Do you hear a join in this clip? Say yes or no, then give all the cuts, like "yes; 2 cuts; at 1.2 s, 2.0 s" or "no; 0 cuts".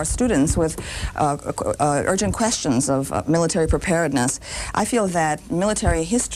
no; 0 cuts